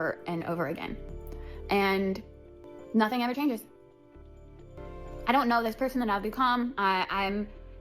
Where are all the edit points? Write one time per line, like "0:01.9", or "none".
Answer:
0:02.6
0:04.8